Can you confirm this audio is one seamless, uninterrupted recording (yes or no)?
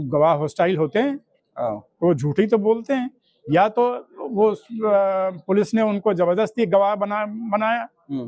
yes